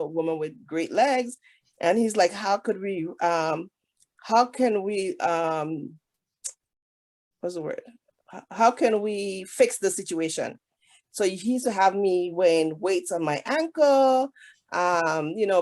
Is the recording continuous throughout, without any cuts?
yes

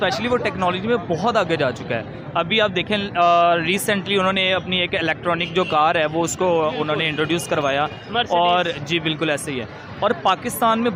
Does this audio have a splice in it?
no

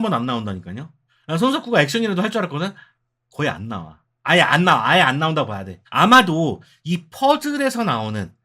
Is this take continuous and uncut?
yes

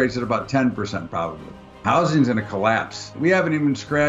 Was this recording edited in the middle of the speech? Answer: yes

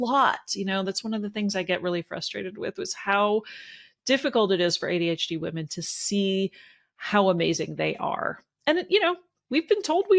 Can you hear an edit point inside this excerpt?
no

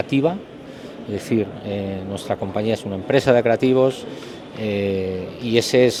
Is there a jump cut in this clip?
no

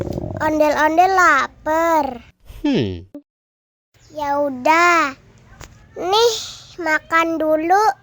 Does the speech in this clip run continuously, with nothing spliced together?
no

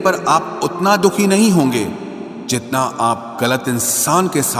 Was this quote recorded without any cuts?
yes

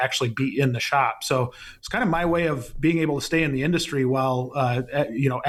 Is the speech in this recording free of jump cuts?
yes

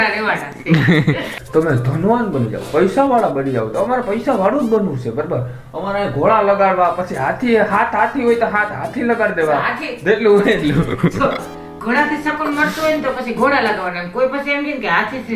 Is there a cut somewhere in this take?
yes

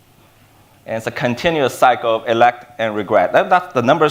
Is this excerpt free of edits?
yes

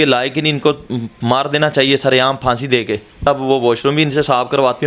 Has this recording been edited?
yes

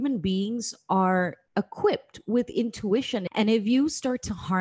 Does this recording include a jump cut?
yes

